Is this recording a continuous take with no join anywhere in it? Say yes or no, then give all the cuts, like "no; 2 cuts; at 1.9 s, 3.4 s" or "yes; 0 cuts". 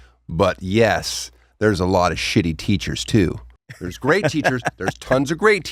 yes; 0 cuts